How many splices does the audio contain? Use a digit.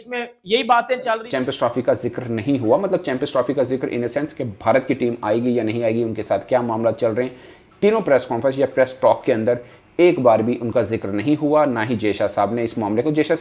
1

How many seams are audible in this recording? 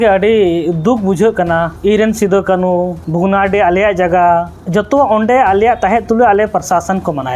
3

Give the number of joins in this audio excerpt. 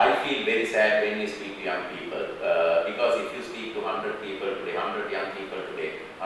0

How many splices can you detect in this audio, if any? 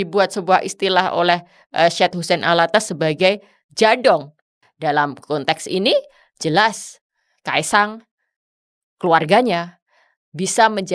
1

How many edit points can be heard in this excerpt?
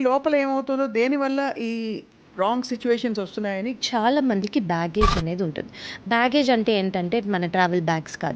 1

